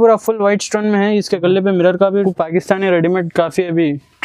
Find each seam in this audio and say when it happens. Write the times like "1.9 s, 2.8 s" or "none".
2.2 s